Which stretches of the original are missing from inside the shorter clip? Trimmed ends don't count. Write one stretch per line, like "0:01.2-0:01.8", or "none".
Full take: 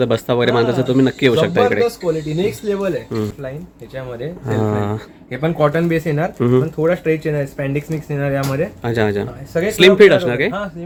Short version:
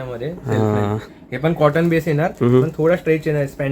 none